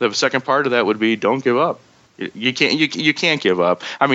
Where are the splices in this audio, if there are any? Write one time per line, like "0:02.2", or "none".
0:01.9